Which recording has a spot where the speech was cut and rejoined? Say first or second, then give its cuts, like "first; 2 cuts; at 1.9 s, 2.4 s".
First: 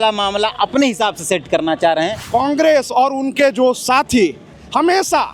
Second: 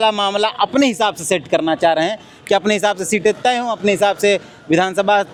first; 1 cut; at 2.2 s